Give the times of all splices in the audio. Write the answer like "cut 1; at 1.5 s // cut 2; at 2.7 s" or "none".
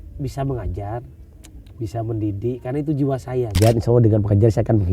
cut 1; at 3.6 s